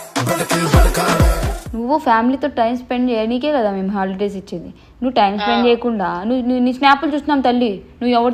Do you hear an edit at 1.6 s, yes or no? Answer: yes